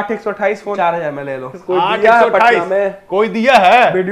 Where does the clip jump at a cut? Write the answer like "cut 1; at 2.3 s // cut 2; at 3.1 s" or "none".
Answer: cut 1; at 0.8 s // cut 2; at 1.5 s